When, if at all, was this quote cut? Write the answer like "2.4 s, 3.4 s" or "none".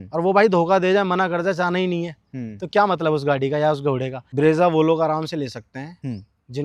4.2 s

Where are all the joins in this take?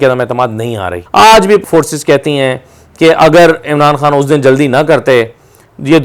0.9 s, 1.7 s

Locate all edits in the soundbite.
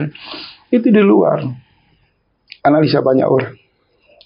none

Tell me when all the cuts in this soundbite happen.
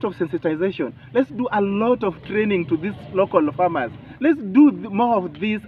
4.2 s

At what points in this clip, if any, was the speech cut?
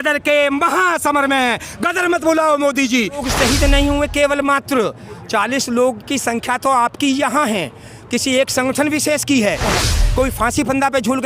3.3 s, 9.7 s

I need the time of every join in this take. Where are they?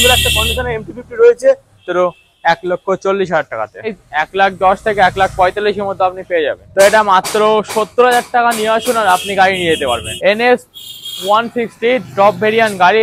1.8 s, 4.0 s, 6.6 s, 10.1 s

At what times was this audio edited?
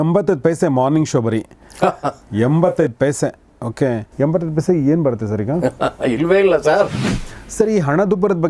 4.1 s, 6.9 s

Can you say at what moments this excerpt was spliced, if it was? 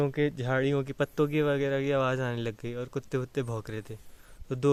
none

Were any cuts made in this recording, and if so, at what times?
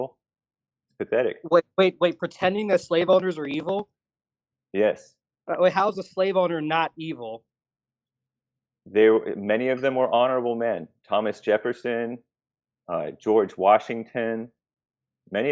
none

